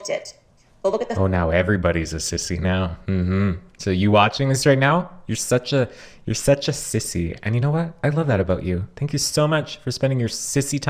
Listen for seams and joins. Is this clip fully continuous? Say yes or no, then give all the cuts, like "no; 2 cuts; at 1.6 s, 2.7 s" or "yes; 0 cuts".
yes; 0 cuts